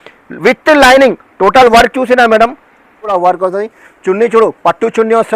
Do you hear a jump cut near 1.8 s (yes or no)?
no